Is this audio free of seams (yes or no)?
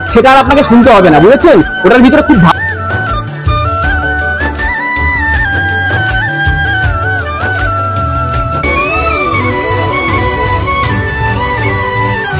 yes